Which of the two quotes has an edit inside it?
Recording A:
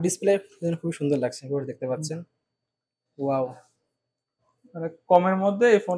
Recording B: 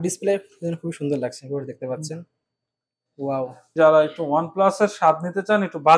B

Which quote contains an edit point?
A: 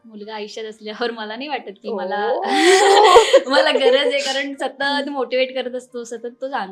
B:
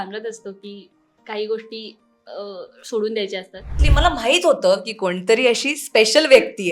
B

